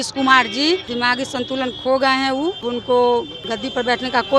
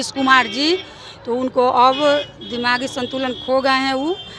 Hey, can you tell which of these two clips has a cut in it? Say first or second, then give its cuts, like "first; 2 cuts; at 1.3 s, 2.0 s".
first; 3 cuts; at 0.9 s, 2.7 s, 3.4 s